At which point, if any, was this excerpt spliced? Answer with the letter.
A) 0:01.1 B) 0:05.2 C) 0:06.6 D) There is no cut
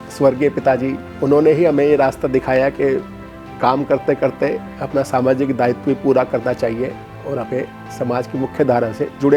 A